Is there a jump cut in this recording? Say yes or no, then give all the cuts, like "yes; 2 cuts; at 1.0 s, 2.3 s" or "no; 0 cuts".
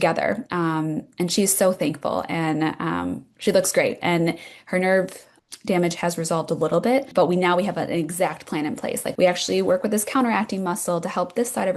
yes; 1 cut; at 9.1 s